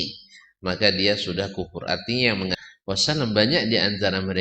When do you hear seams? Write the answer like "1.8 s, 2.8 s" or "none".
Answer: 2.6 s